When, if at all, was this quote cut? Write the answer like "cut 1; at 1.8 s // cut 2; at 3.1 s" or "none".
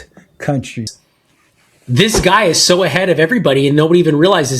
cut 1; at 0.9 s